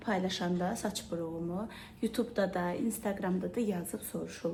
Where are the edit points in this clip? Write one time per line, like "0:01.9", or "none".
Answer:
none

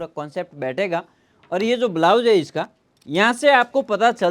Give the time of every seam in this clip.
none

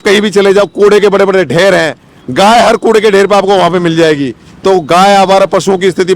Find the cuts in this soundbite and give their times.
none

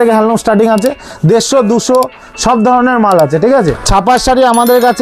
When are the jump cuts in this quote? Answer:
0:03.9

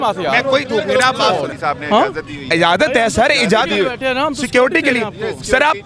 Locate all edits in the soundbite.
0:01.4

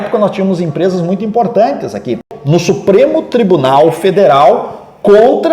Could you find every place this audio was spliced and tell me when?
0:02.3

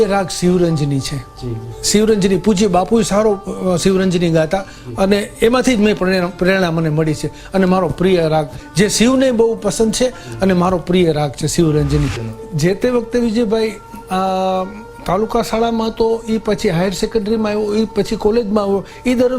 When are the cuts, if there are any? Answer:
0:12.3

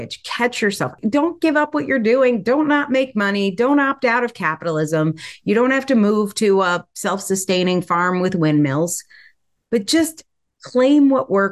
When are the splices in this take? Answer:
0:01.0

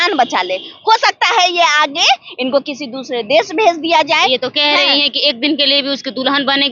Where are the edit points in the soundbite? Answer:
none

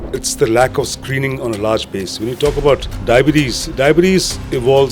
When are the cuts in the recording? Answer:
0:02.9

